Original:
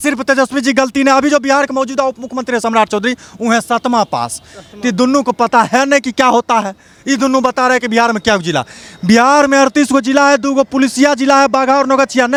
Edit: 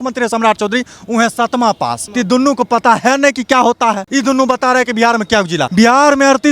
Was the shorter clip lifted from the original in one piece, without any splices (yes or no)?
no